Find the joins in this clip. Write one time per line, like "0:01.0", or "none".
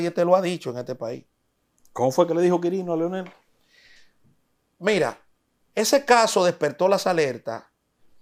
none